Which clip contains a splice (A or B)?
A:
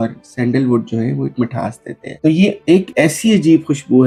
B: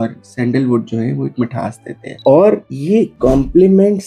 B